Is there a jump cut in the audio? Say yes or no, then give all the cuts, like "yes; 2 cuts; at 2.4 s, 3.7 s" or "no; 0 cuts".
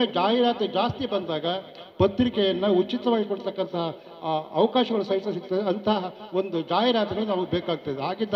no; 0 cuts